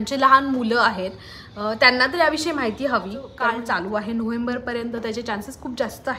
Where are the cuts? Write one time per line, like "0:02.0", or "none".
0:03.4